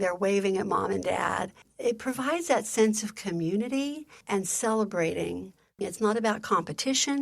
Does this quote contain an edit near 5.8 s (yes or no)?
yes